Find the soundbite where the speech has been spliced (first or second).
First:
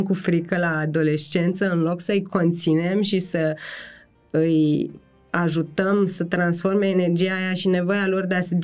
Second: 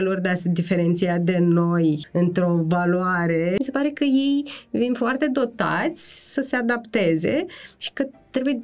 second